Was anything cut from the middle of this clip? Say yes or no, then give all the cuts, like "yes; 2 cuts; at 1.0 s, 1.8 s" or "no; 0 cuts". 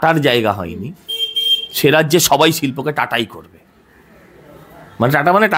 no; 0 cuts